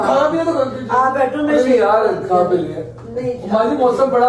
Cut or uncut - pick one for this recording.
uncut